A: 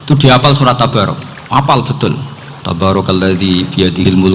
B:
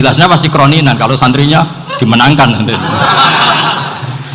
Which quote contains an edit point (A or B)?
A